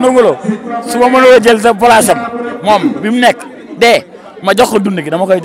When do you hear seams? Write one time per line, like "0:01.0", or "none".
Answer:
none